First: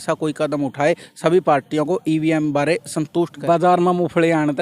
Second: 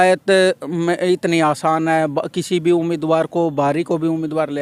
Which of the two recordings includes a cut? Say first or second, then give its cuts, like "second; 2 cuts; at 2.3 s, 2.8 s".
first; 1 cut; at 3.4 s